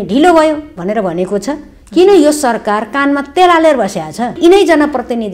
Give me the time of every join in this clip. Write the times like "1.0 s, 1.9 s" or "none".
4.4 s